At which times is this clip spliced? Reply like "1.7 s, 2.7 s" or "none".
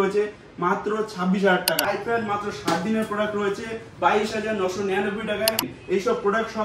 1.8 s, 5.7 s